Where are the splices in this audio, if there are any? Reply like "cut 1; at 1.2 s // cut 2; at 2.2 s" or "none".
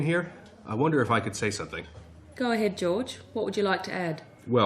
none

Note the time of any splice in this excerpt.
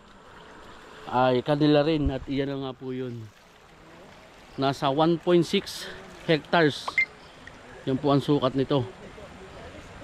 none

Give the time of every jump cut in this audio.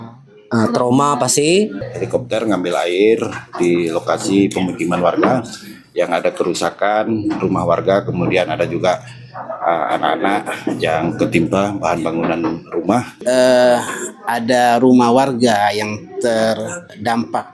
cut 1; at 1.8 s // cut 2; at 13.2 s

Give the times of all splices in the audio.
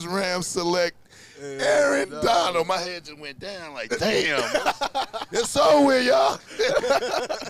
none

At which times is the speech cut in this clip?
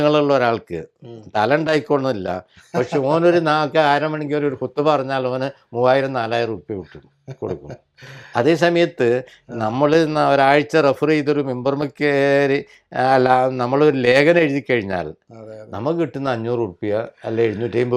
none

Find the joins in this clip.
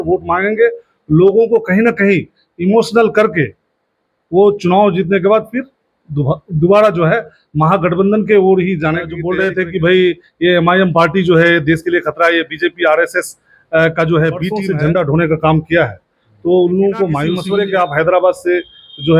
cut 1; at 9.2 s // cut 2; at 14.6 s // cut 3; at 17.3 s

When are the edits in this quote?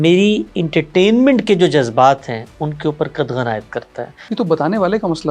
cut 1; at 4.2 s

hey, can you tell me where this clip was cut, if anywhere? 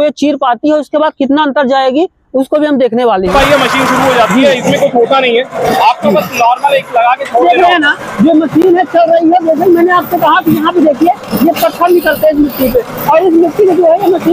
cut 1; at 3.3 s // cut 2; at 7.4 s

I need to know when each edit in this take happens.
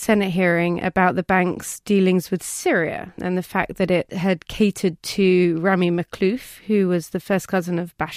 none

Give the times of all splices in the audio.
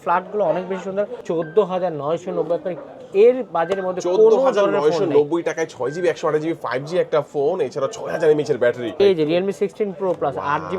cut 1; at 1.2 s // cut 2; at 9.0 s

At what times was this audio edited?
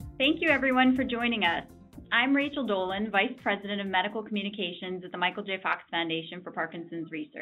cut 1; at 1.6 s

